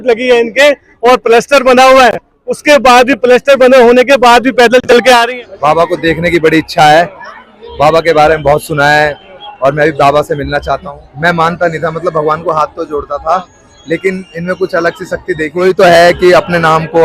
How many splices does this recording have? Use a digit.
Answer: 3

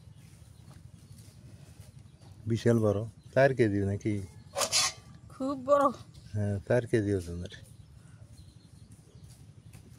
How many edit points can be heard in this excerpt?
0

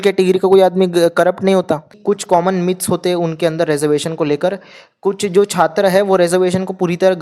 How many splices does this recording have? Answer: 1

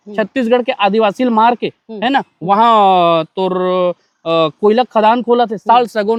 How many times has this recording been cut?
0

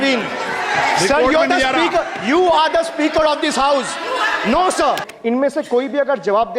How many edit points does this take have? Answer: 1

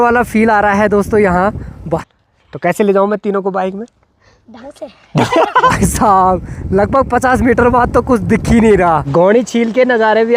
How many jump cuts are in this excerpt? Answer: 3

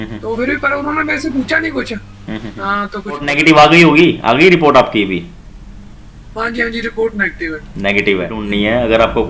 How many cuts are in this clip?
2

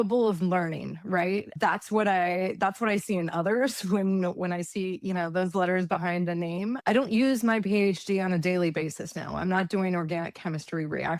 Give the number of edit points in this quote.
2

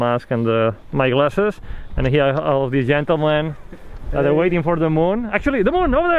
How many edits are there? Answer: 1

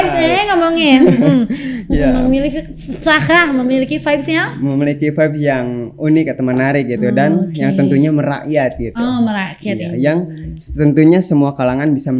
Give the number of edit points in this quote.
0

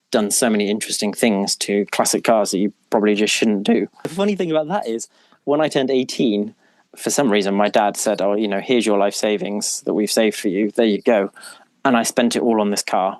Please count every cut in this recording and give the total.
1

